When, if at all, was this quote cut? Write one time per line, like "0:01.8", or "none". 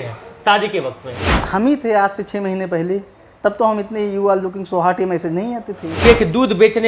0:01.3
0:06.0

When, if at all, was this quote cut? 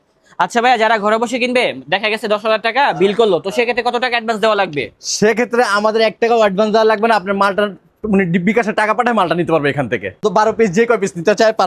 none

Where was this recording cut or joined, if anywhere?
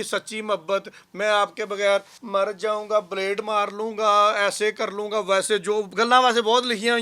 0:02.2

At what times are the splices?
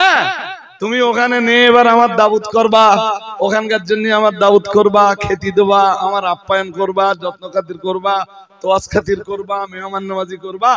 none

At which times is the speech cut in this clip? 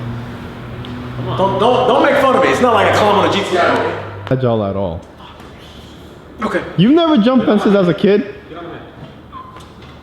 0:04.3

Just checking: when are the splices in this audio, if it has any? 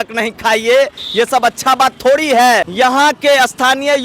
0:02.7

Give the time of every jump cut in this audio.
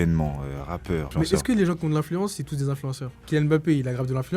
0:01.1
0:03.2

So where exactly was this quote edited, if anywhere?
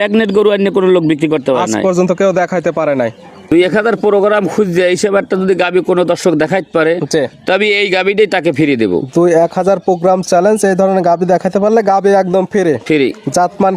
0:03.5

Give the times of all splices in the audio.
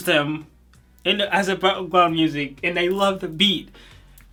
none

